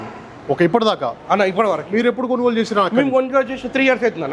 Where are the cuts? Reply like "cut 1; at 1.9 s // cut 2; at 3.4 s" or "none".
none